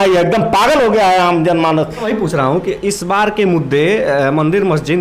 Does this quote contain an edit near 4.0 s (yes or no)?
no